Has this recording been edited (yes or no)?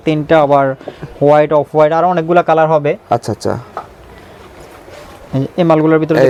no